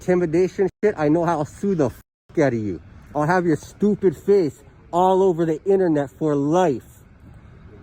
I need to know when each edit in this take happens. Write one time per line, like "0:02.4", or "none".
none